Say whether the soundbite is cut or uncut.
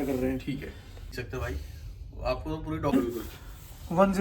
cut